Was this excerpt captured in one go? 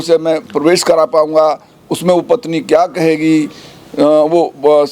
yes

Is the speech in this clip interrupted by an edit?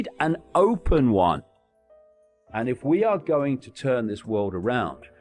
yes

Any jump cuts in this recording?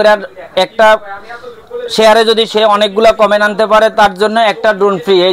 no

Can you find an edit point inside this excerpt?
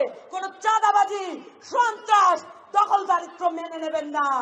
no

